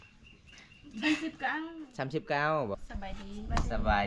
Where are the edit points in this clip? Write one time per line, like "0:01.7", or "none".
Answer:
0:02.7